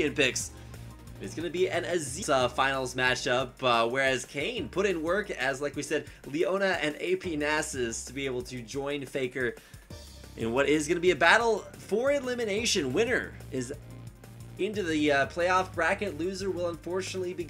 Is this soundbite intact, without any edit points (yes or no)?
yes